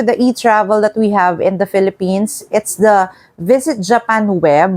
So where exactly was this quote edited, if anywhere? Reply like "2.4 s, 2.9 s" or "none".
none